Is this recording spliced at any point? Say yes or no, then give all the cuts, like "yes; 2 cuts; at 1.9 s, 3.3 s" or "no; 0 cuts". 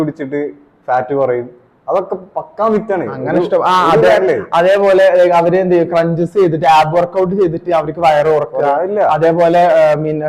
no; 0 cuts